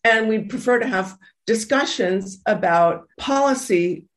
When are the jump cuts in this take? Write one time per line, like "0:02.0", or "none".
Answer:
0:03.1